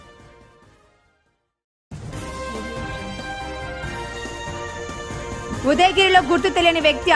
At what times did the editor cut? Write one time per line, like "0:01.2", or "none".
0:05.5